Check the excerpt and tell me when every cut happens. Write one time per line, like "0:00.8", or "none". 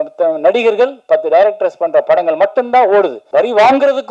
0:03.2